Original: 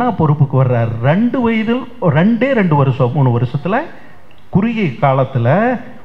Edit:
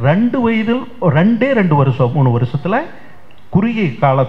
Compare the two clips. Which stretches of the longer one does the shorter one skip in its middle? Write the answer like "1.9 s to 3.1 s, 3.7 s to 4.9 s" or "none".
none